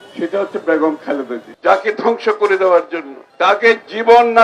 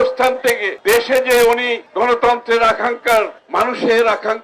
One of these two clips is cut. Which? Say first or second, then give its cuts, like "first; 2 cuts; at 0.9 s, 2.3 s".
first; 1 cut; at 1.5 s